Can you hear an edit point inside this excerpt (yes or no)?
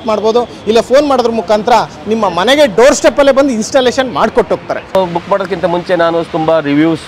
yes